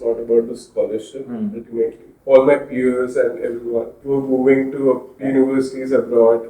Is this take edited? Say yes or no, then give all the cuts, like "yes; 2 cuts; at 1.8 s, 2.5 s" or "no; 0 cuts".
yes; 3 cuts; at 2.1 s, 4.0 s, 5.1 s